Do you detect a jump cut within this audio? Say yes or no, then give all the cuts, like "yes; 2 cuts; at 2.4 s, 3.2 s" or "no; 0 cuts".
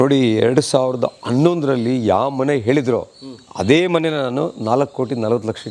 no; 0 cuts